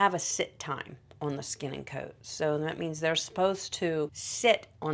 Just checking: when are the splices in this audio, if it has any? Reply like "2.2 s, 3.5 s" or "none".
none